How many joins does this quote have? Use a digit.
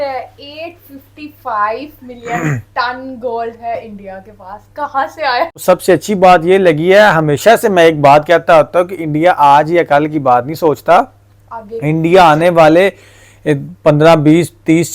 1